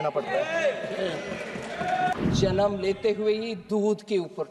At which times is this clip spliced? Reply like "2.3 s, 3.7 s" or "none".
2.1 s